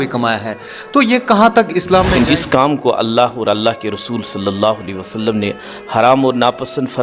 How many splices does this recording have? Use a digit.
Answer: 1